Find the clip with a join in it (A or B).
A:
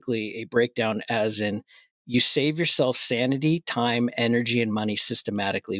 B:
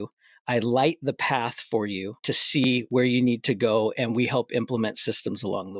B